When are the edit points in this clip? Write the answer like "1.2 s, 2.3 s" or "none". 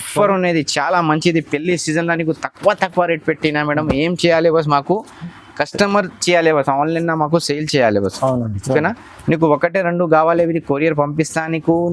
none